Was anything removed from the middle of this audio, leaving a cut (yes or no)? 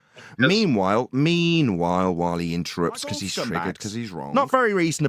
yes